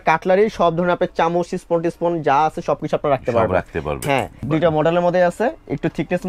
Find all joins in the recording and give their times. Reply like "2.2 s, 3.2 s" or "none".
4.4 s

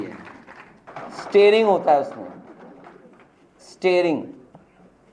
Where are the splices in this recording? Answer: 1.0 s

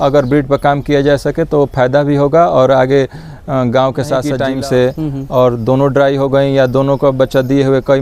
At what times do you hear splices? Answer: 4.3 s

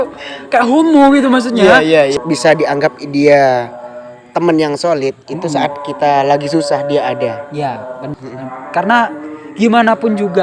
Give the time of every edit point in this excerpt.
2.1 s, 8.2 s

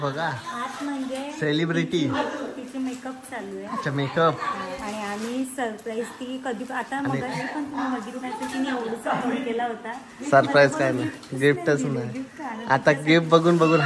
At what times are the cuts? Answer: none

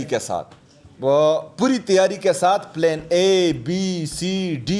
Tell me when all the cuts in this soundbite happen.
none

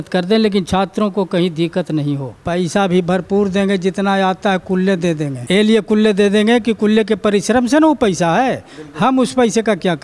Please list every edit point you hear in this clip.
2.3 s, 5.3 s

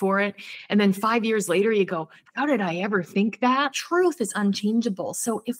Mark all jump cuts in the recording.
3.8 s

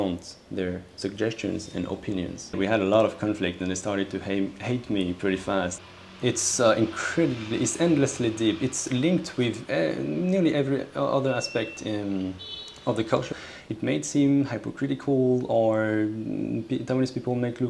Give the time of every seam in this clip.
2.5 s, 5.8 s, 13.4 s

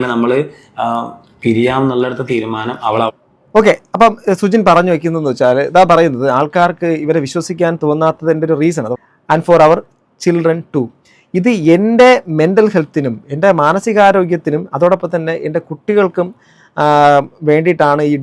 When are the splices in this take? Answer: 8.9 s

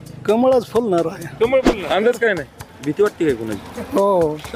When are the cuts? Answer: 1.8 s

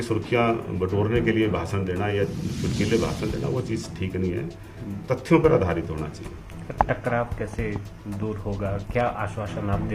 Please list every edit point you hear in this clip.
none

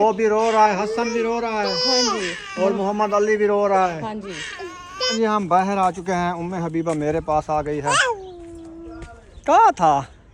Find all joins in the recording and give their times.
5.1 s, 8.0 s

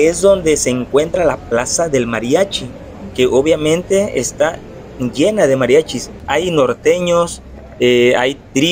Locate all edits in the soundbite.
6.2 s

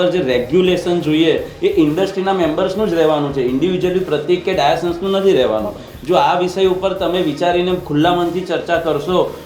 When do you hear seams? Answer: none

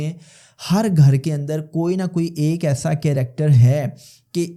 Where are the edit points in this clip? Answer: none

